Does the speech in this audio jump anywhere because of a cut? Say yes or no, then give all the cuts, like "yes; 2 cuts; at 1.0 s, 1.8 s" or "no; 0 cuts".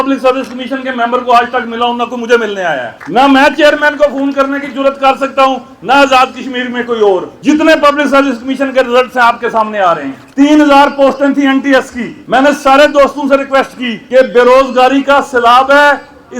no; 0 cuts